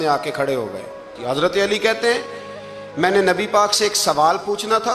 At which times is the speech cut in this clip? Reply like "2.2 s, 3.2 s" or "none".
1.1 s